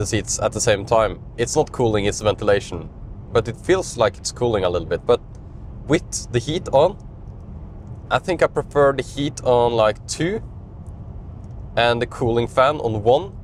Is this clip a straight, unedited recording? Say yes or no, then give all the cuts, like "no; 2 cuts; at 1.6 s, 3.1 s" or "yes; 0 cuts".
yes; 0 cuts